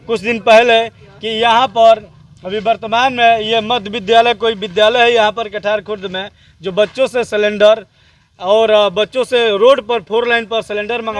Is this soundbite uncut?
yes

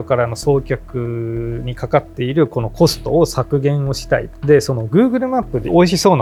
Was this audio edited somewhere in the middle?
no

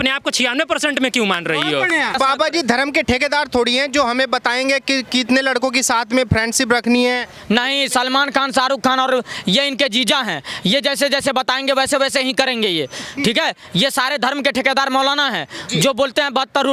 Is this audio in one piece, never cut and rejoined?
no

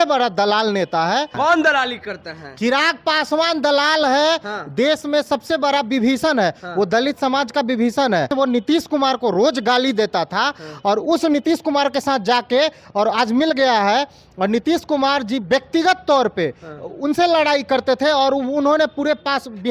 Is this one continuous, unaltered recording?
no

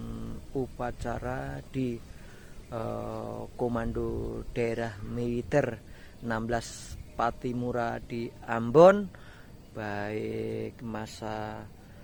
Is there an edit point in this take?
no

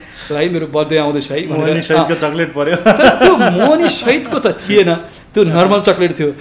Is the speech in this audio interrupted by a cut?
no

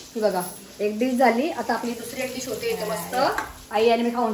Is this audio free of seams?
yes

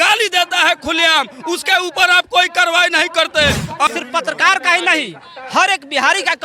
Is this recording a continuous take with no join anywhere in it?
no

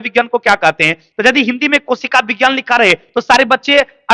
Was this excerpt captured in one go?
yes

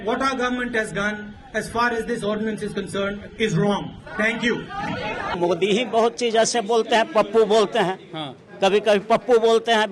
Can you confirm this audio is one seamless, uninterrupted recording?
no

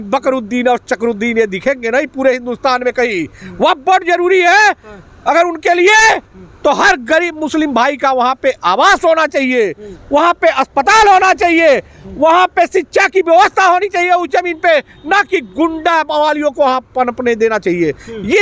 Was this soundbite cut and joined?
no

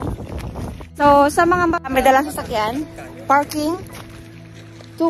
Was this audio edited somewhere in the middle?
yes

